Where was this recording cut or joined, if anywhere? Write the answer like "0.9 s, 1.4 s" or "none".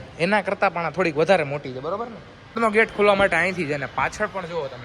2.6 s